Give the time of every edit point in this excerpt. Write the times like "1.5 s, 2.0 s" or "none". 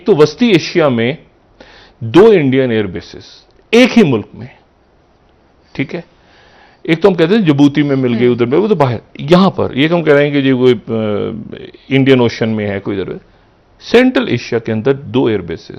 none